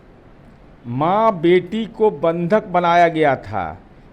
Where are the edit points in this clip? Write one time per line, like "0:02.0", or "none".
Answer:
none